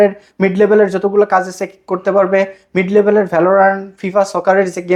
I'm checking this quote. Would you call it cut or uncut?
uncut